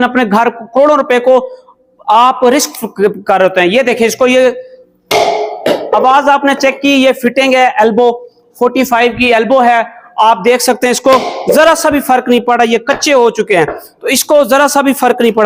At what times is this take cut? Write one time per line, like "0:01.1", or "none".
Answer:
none